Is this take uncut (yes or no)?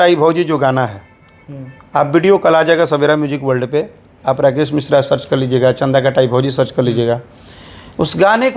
yes